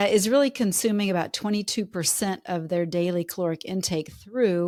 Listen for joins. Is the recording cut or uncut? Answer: uncut